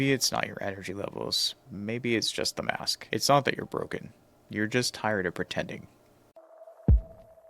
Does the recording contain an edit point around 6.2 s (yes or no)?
yes